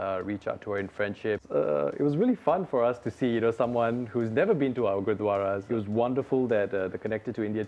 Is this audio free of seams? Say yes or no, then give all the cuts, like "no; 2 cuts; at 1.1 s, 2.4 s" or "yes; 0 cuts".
no; 2 cuts; at 1.4 s, 5.6 s